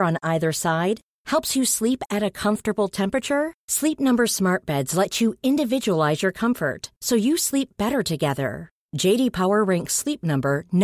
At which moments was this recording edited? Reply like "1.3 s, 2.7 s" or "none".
none

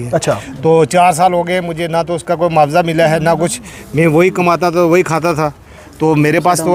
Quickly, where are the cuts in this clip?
none

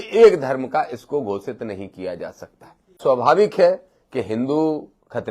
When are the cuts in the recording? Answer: 3.0 s

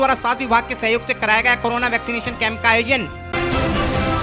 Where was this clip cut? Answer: 3.2 s

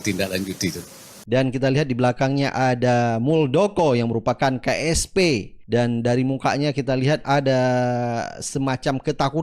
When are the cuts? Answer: 1.1 s, 5.5 s

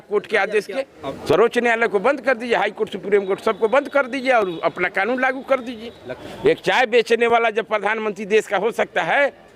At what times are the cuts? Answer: 1.0 s, 6.0 s

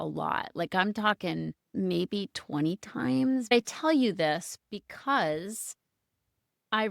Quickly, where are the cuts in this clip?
1.6 s, 3.5 s

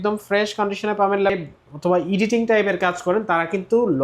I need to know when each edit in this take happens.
1.4 s

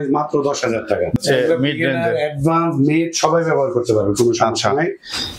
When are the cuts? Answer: 1.2 s

